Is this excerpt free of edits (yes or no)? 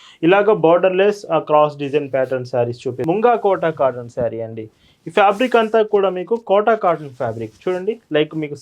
no